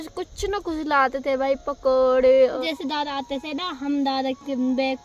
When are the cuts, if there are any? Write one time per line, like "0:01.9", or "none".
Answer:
0:02.6